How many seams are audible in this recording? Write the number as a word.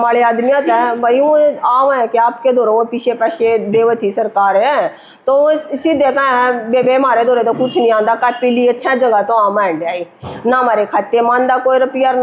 zero